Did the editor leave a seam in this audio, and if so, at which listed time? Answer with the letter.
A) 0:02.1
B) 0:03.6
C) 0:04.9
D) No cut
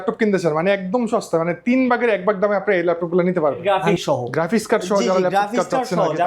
B